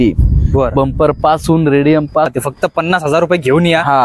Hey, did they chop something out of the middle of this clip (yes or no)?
yes